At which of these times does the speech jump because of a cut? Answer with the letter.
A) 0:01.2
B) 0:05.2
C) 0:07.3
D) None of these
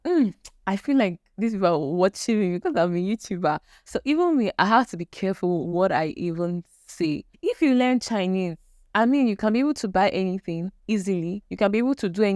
C